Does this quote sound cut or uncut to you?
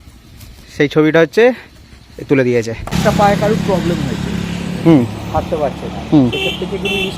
cut